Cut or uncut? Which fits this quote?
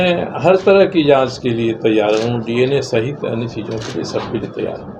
uncut